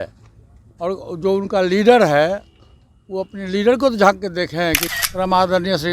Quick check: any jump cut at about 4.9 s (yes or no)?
yes